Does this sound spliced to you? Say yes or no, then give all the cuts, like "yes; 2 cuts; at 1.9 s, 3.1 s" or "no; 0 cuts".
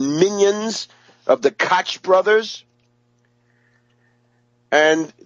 no; 0 cuts